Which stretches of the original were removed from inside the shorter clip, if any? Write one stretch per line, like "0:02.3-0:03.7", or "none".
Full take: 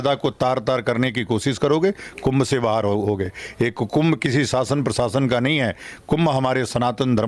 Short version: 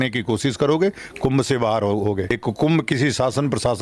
0:03.4-0:03.7